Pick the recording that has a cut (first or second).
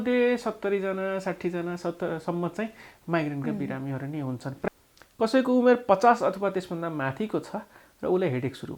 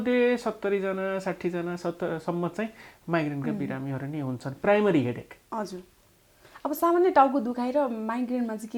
first